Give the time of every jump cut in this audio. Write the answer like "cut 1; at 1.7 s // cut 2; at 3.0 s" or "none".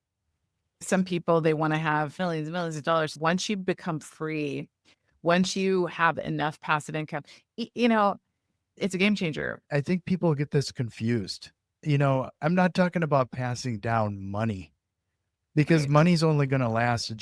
cut 1; at 3.1 s // cut 2; at 9.6 s